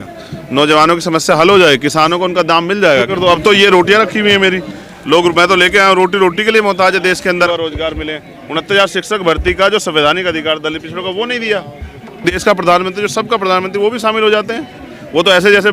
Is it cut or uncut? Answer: cut